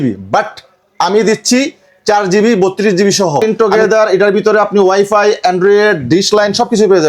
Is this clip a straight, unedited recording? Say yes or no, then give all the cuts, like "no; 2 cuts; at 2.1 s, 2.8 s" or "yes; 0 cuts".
no; 1 cut; at 3.4 s